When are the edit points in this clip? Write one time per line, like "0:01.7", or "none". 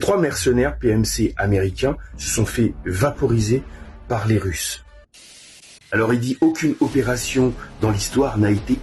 0:05.3